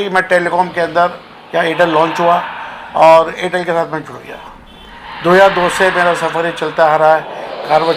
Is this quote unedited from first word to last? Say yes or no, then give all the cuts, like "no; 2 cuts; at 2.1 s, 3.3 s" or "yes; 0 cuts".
yes; 0 cuts